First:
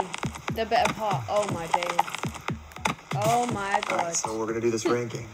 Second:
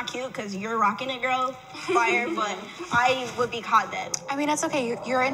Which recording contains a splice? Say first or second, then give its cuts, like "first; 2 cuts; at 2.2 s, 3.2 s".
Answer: second; 1 cut; at 4.1 s